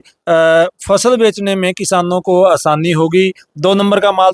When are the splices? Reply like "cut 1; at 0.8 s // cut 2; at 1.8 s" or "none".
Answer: none